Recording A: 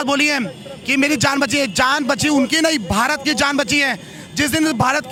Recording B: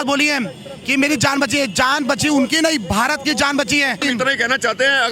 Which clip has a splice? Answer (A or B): B